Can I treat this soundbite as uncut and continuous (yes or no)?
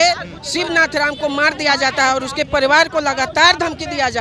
yes